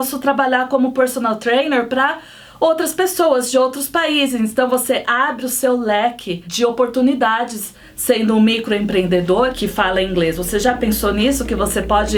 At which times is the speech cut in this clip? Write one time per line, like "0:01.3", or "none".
none